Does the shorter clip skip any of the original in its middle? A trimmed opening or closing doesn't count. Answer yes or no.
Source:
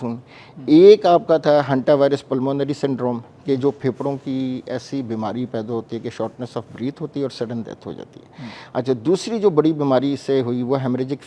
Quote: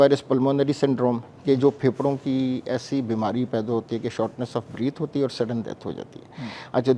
no